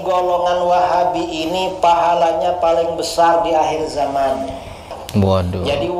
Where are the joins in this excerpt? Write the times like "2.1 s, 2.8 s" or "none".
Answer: 5.0 s

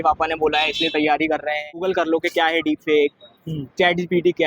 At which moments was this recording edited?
1.8 s

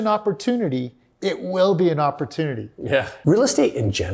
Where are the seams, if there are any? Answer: 3.1 s

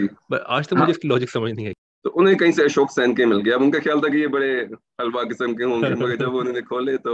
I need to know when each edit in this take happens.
1.6 s

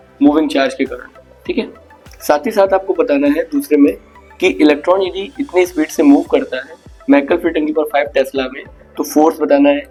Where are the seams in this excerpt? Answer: none

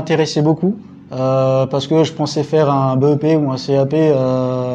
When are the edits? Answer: none

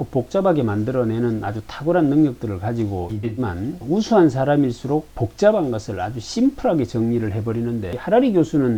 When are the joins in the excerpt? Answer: none

